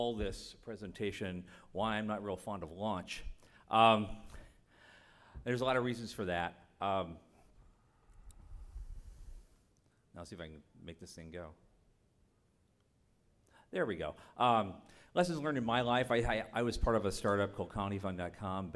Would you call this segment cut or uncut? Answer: cut